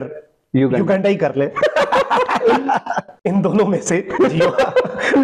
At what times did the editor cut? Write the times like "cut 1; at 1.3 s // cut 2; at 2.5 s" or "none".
cut 1; at 3.0 s

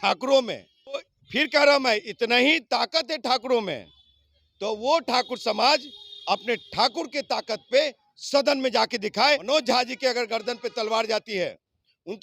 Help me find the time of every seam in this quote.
cut 1; at 1.2 s // cut 2; at 9.4 s

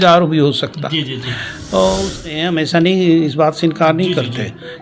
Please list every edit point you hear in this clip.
cut 1; at 2.2 s

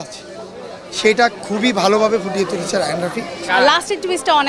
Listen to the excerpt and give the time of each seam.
cut 1; at 3.5 s

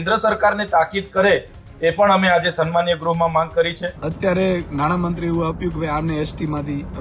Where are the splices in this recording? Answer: cut 1; at 3.9 s

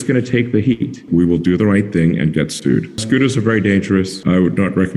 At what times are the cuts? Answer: cut 1; at 1.0 s // cut 2; at 3.0 s // cut 3; at 4.1 s

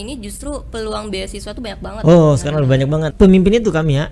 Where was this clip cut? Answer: cut 1; at 3.1 s

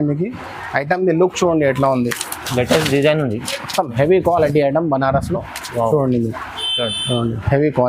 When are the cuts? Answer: none

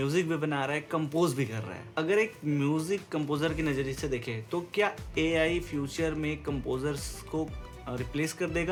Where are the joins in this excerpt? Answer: none

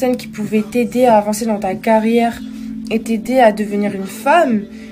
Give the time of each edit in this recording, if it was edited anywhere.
none

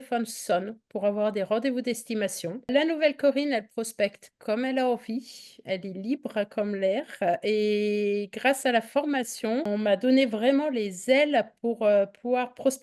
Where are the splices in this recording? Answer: cut 1; at 2.7 s // cut 2; at 9.7 s

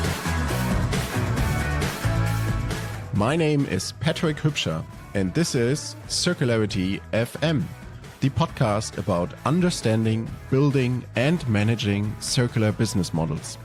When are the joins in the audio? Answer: none

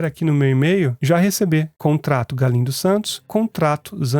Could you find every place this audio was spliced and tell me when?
cut 1; at 1.0 s // cut 2; at 1.7 s // cut 3; at 3.2 s

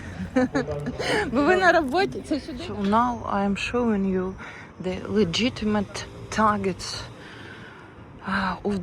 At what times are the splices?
cut 1; at 2.5 s

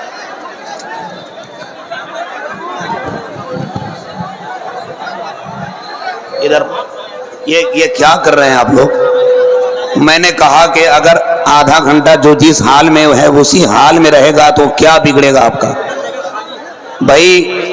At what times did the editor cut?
cut 1; at 6.4 s

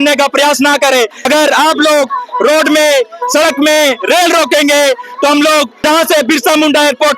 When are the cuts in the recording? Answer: cut 1; at 1.2 s // cut 2; at 5.7 s

